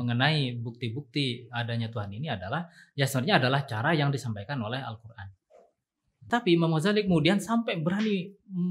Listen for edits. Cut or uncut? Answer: cut